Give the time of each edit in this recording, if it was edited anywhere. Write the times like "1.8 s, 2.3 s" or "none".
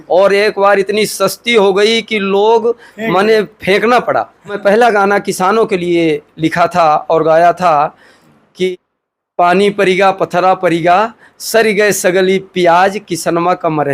4.6 s, 8.7 s